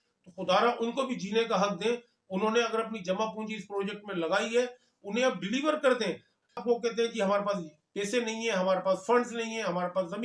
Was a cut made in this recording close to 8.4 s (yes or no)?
no